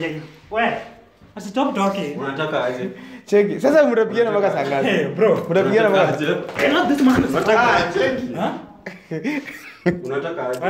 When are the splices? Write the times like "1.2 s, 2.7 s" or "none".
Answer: none